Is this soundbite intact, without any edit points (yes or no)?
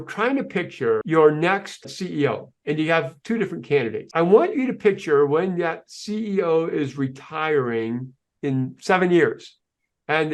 no